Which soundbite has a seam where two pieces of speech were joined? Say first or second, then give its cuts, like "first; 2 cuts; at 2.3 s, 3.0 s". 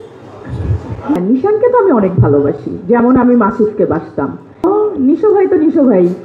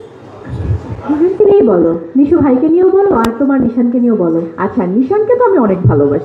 first; 2 cuts; at 1.2 s, 4.6 s